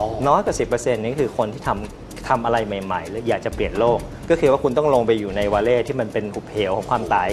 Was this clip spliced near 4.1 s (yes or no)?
yes